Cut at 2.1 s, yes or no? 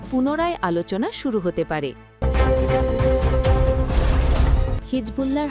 yes